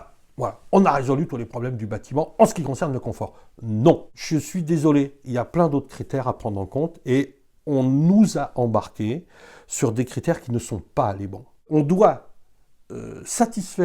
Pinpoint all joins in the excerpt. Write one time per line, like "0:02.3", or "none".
0:04.1
0:11.6